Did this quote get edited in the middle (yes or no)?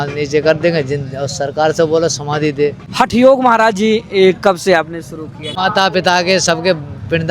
yes